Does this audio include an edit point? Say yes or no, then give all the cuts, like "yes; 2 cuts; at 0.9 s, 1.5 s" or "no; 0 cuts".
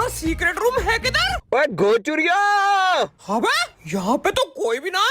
yes; 2 cuts; at 1.3 s, 3.2 s